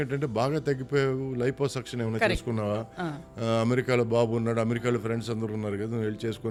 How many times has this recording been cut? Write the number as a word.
zero